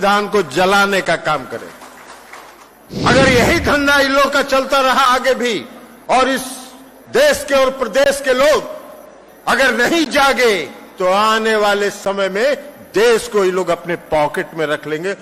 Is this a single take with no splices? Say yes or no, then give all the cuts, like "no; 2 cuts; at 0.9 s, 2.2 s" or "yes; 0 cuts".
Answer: no; 1 cut; at 2.6 s